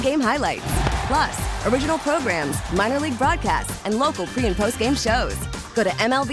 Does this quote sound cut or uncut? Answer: uncut